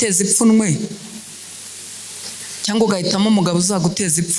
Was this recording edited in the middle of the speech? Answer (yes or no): no